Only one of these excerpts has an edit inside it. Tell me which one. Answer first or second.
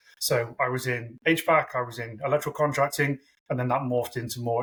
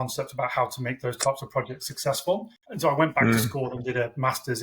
second